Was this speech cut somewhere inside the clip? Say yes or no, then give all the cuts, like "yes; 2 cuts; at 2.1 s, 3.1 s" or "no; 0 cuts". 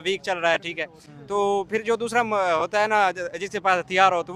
no; 0 cuts